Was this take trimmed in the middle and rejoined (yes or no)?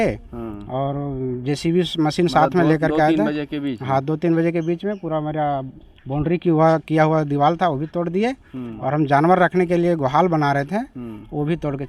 no